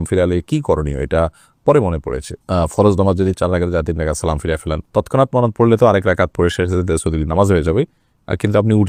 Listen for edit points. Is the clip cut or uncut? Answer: uncut